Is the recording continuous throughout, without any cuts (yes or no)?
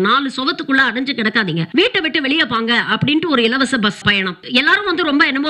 no